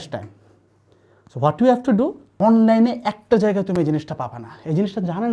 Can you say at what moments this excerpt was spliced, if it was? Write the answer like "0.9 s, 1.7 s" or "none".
2.2 s